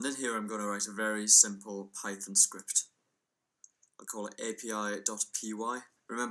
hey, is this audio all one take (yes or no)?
yes